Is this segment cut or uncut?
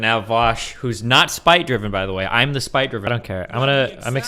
cut